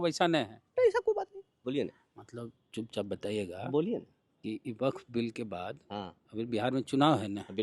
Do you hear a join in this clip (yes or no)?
yes